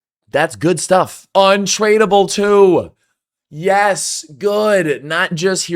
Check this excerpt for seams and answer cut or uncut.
cut